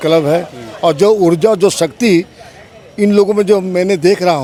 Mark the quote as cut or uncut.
uncut